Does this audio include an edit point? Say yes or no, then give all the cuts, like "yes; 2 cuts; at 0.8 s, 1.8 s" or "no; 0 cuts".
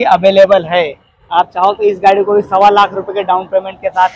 no; 0 cuts